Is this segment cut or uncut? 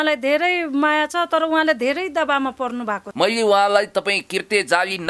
cut